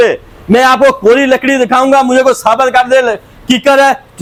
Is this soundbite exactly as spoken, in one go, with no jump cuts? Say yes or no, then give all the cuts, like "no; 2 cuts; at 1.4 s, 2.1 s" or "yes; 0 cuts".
yes; 0 cuts